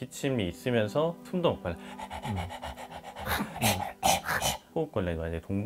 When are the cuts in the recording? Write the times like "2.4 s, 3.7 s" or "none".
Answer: 4.6 s